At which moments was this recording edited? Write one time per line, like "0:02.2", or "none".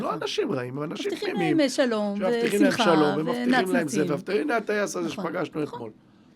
none